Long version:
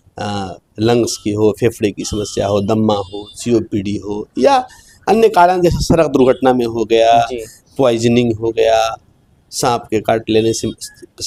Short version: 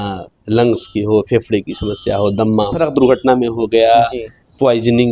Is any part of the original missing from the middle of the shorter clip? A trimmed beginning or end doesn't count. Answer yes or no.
yes